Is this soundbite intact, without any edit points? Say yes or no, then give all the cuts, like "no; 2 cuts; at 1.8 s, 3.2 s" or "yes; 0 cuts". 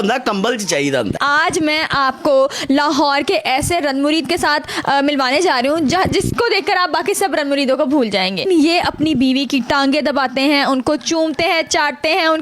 no; 2 cuts; at 1.1 s, 8.4 s